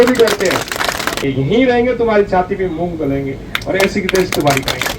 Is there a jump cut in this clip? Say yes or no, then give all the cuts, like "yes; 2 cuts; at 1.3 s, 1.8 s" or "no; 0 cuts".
yes; 1 cut; at 1.2 s